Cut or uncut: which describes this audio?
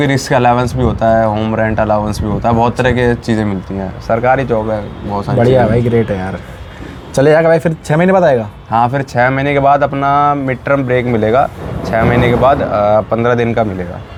uncut